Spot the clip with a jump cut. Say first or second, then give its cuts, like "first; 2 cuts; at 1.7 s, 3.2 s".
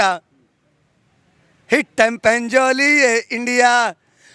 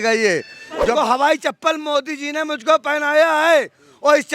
second; 1 cut; at 0.9 s